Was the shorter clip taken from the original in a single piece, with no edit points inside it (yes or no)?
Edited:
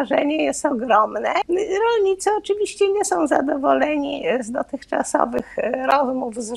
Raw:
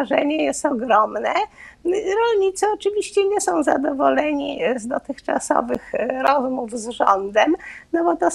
no